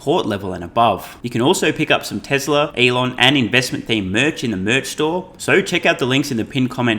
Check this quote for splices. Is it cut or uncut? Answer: cut